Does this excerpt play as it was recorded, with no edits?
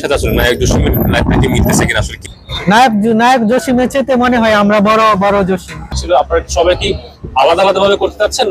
no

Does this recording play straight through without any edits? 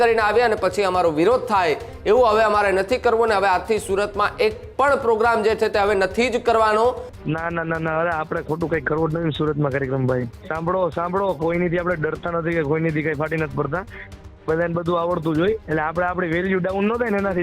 no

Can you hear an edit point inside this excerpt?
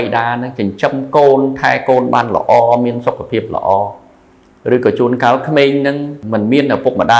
yes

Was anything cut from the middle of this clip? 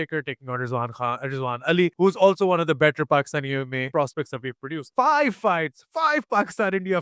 yes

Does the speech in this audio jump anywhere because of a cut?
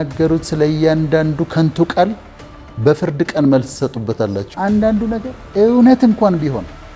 yes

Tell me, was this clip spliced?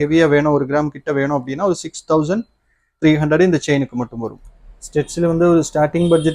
yes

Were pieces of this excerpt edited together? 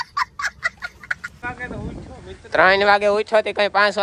no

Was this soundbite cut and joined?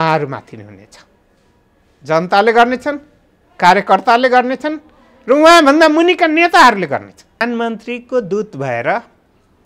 yes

